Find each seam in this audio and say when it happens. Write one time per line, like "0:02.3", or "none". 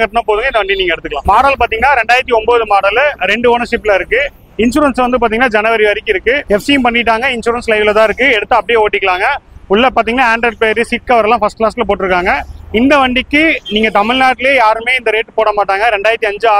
0:01.2